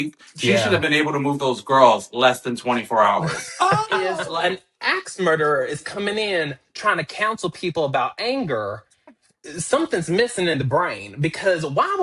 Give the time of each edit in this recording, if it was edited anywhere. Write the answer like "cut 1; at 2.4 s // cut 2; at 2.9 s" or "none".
cut 1; at 4.1 s